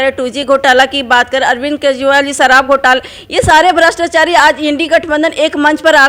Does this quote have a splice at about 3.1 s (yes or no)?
no